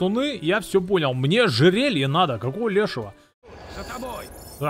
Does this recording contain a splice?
yes; 1 cut; at 3.5 s

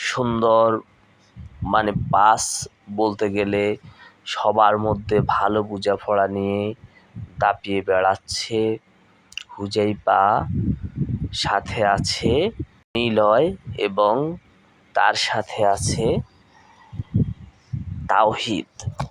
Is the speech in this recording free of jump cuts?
no; 1 cut; at 12.9 s

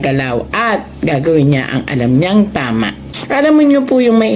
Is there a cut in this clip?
yes; 1 cut; at 3.1 s

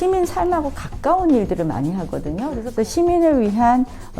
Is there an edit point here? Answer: yes; 1 cut; at 2.5 s

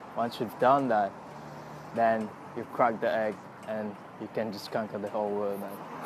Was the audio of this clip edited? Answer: no; 0 cuts

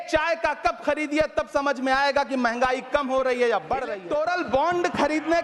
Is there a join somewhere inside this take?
yes; 1 cut; at 4.0 s

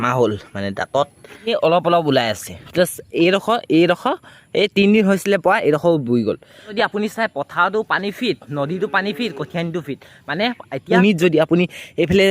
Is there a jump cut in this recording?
yes; 3 cuts; at 1.5 s, 6.7 s, 10.8 s

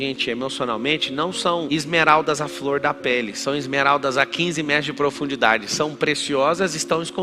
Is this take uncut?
yes; 0 cuts

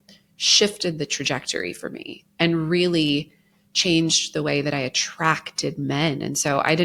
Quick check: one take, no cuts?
yes; 0 cuts

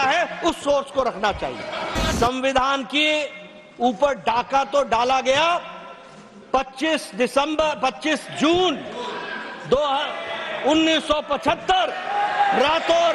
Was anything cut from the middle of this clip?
yes; 1 cut; at 2.1 s

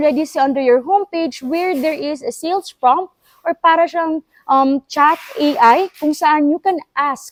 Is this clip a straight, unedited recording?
yes; 0 cuts

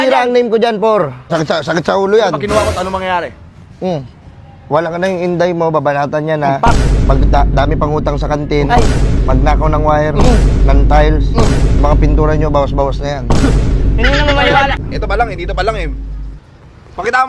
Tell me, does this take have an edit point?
yes; 2 cuts; at 1.3 s, 14.9 s

